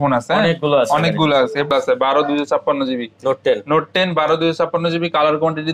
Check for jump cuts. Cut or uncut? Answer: cut